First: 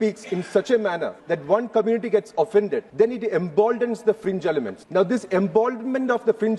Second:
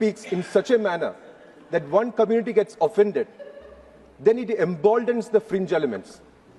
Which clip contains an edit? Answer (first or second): first